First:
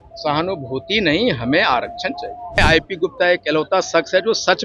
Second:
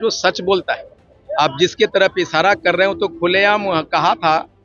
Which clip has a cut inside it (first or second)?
first